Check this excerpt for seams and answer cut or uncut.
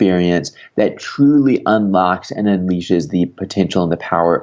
uncut